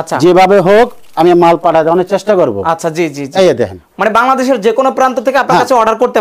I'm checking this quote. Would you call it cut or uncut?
uncut